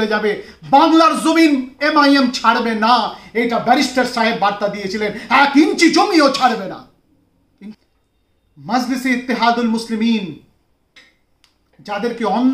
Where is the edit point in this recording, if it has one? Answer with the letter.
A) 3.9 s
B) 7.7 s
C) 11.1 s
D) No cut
B